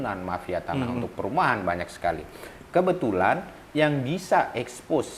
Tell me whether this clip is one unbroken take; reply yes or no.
yes